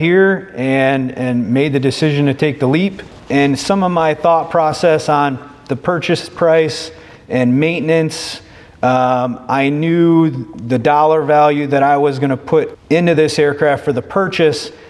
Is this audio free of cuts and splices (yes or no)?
no